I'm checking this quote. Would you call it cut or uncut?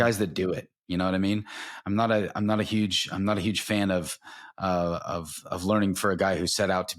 uncut